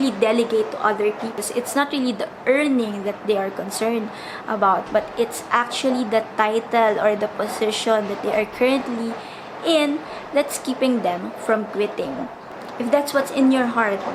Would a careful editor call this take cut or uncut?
cut